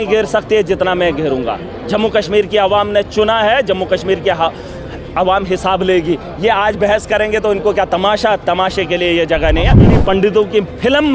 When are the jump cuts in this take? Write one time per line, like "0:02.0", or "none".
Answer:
0:09.8